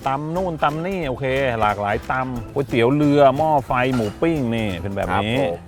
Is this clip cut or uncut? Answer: uncut